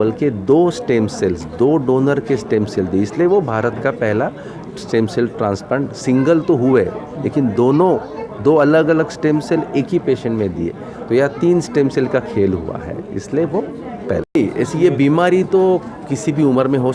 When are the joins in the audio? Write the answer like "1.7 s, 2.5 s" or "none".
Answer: 14.4 s